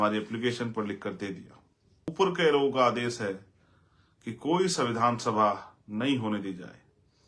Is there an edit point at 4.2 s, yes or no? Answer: no